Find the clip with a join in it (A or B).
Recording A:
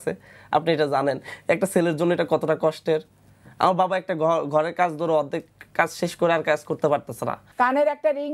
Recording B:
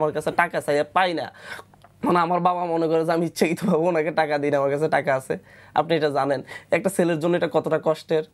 A